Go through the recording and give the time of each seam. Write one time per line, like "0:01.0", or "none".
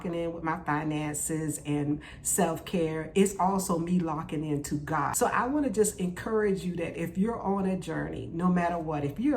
0:05.1